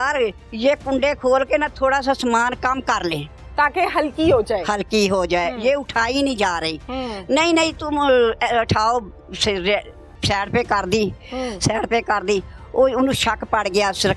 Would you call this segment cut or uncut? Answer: uncut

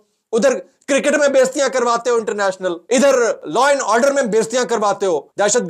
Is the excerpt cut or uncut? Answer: cut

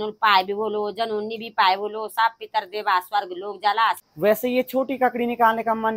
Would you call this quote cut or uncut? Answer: cut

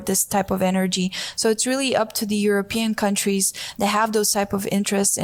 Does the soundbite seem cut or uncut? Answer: uncut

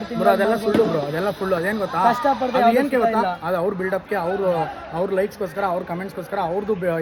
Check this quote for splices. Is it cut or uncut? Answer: uncut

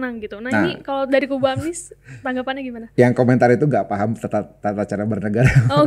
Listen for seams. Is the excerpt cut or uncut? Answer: uncut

